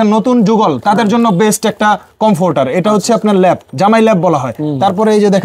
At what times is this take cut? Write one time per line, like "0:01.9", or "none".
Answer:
none